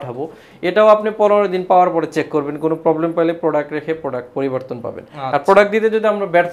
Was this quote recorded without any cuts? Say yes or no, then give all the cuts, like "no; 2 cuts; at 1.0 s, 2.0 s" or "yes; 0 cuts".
yes; 0 cuts